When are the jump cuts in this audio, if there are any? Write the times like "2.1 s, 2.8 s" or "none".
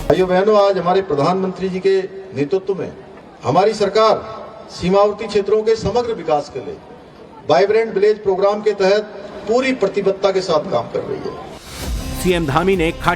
5.5 s